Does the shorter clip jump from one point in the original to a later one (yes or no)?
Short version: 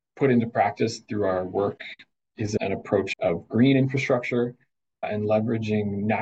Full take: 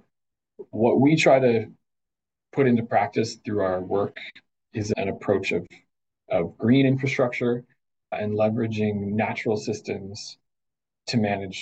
yes